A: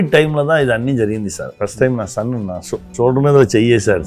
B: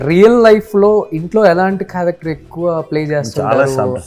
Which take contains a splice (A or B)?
A